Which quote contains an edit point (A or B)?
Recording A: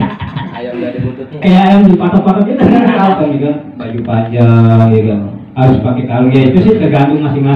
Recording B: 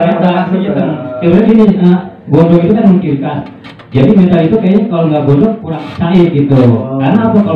A